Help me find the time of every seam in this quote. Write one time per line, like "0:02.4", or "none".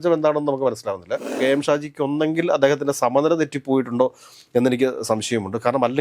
0:01.3